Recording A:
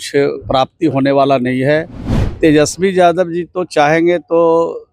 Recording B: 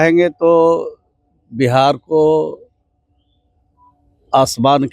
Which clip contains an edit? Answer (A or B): A